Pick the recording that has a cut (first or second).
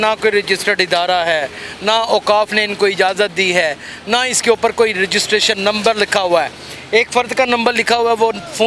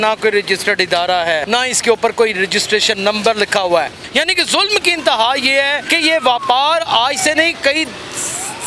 second